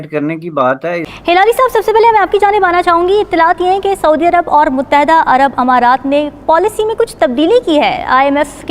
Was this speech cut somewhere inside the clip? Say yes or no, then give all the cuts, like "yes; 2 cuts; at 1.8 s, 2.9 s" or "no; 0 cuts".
yes; 1 cut; at 1.0 s